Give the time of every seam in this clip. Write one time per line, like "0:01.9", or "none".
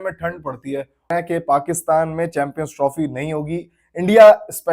0:01.1

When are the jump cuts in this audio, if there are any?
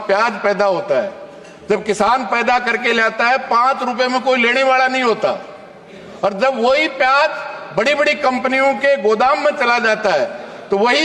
none

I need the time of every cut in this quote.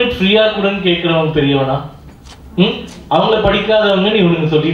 none

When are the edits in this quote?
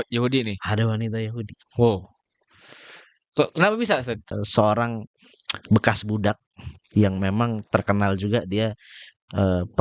0:04.2

